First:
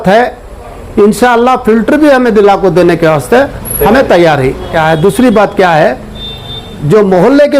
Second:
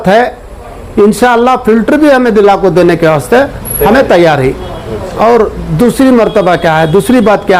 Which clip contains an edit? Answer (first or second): first